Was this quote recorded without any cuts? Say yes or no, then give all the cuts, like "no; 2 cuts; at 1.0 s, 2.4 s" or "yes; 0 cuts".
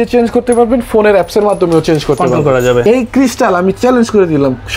no; 1 cut; at 2.8 s